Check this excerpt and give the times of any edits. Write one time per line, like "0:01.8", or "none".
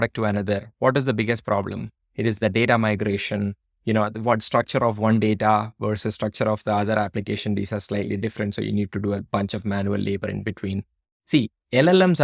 none